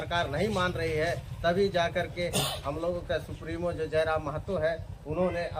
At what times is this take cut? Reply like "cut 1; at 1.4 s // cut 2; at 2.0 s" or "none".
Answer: none

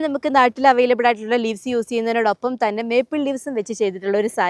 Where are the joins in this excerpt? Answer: none

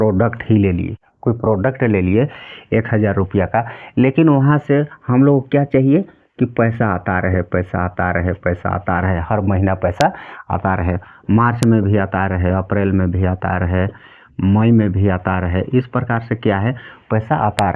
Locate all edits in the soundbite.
none

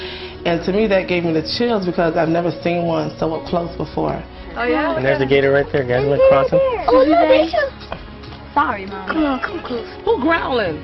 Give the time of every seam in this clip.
cut 1; at 7.7 s

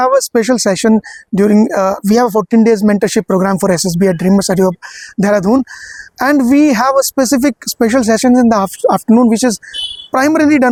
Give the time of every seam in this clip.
none

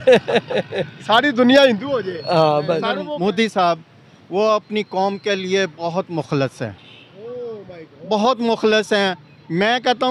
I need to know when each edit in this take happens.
cut 1; at 3.0 s

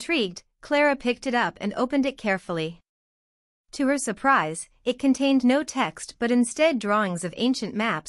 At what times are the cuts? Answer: cut 1; at 2.9 s

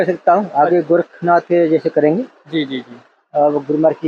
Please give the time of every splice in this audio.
none

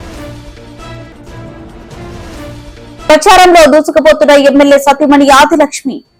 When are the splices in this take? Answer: none

